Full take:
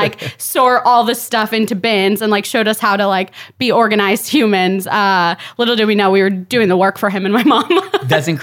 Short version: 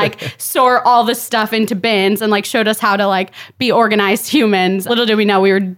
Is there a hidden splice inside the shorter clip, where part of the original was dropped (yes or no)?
yes